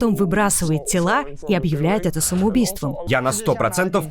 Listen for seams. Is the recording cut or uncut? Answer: cut